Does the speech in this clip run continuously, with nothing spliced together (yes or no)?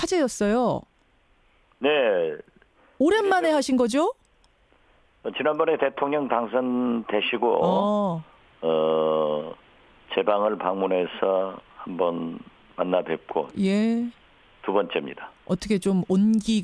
no